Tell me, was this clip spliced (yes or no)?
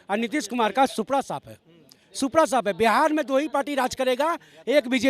no